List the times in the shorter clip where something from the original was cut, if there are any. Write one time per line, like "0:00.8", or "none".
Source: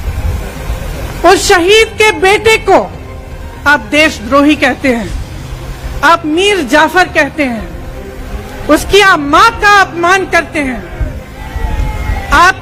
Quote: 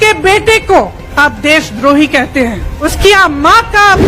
0:01.0
0:02.7